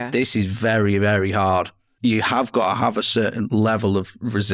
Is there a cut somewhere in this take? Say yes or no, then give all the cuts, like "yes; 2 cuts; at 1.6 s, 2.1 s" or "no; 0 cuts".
yes; 2 cuts; at 1.8 s, 3.5 s